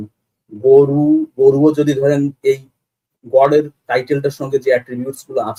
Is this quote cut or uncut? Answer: uncut